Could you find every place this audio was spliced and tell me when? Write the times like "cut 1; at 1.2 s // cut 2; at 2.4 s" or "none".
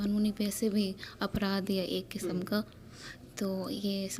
none